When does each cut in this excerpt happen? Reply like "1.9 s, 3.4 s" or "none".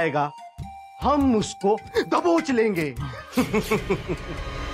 none